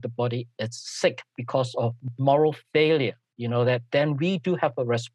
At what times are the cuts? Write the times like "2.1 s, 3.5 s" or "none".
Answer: 2.1 s